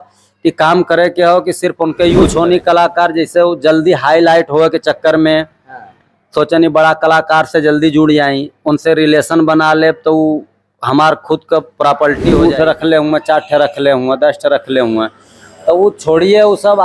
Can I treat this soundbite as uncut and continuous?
no; 2 cuts; at 2.1 s, 12.4 s

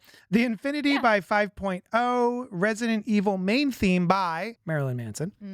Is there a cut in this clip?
yes; 1 cut; at 4.6 s

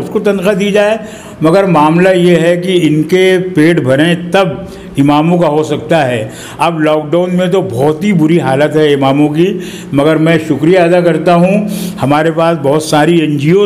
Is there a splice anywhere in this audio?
no; 0 cuts

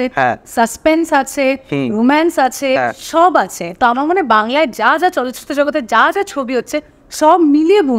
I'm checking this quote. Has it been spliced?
no; 0 cuts

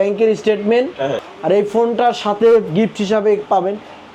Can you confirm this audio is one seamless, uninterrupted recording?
no; 1 cut; at 1.2 s

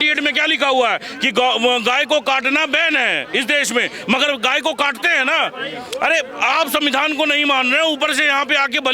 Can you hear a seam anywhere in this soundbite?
no; 0 cuts

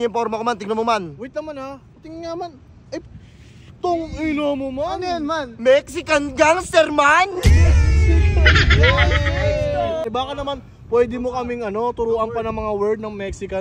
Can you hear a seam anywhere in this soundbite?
yes; 1 cut; at 10.0 s

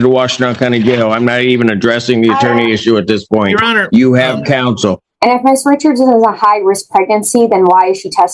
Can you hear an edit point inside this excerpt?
yes; 1 cut; at 5.1 s

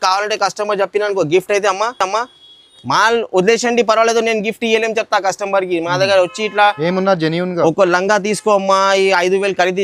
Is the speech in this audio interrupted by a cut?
no; 0 cuts

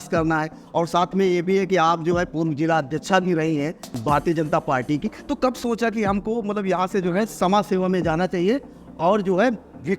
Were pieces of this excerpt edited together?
yes; 1 cut; at 3.8 s

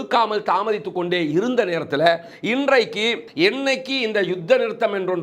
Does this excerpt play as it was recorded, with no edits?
no; 1 cut; at 3.2 s

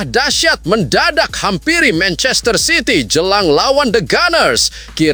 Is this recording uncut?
yes; 0 cuts

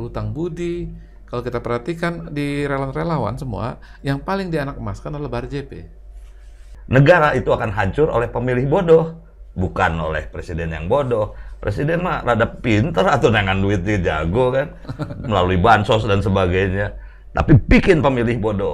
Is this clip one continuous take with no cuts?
no; 1 cut; at 6.7 s

